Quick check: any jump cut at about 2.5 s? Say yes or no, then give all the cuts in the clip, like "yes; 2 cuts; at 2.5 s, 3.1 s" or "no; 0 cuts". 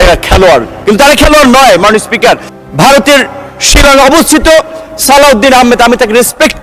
yes; 1 cut; at 2.5 s